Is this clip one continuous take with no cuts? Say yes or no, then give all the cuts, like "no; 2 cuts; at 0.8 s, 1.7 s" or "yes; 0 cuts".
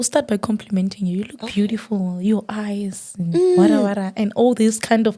yes; 0 cuts